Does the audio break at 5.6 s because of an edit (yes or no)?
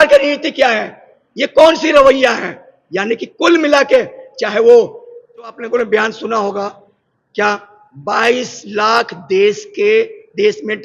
yes